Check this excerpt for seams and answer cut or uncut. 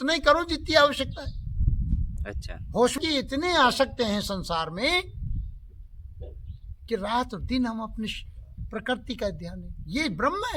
cut